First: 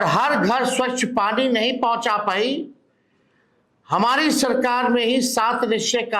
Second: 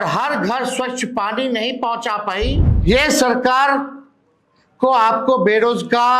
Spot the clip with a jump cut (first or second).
second